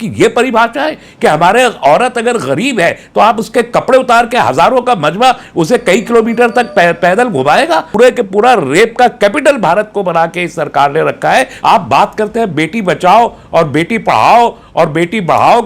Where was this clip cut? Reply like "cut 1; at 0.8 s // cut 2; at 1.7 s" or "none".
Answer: cut 1; at 7.9 s // cut 2; at 11.5 s